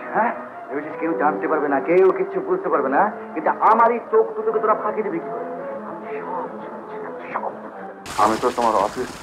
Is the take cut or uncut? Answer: cut